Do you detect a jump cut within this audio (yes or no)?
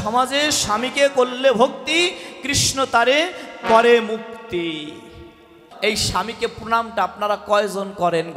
yes